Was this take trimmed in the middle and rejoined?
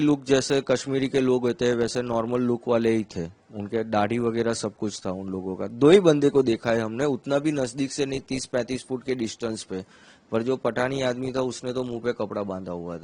no; 0 cuts

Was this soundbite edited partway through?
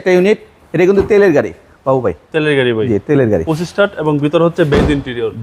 no; 0 cuts

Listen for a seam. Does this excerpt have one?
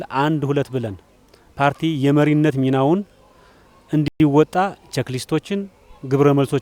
no; 0 cuts

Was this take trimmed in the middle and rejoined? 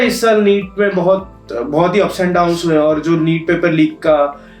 no; 0 cuts

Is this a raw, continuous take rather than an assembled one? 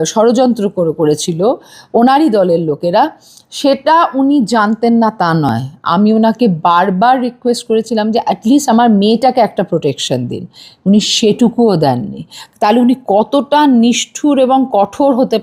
yes; 0 cuts

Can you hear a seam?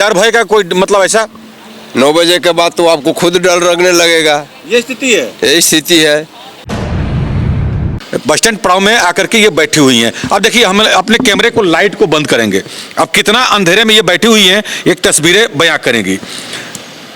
yes; 2 cuts; at 6.6 s, 8.0 s

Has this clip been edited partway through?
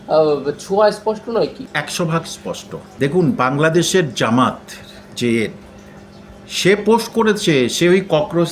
yes; 2 cuts; at 1.6 s, 2.9 s

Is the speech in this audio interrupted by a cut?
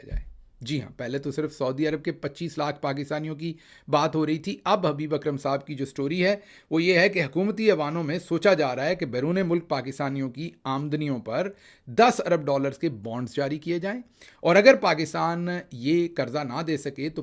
no; 0 cuts

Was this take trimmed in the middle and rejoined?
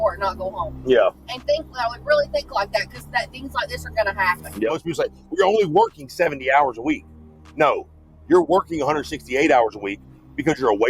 yes; 1 cut; at 4.8 s

